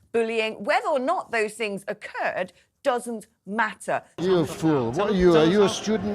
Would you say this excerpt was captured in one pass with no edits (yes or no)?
no